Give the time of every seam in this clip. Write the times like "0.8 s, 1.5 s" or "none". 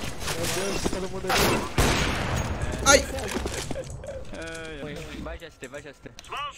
4.8 s